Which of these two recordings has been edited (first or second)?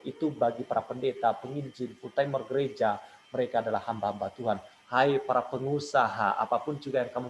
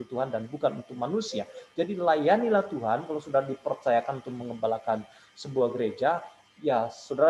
first